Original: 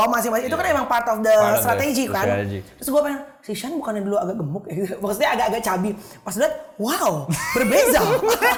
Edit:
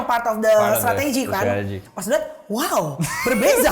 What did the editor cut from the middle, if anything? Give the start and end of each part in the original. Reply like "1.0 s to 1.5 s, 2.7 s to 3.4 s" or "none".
2.7 s to 6.1 s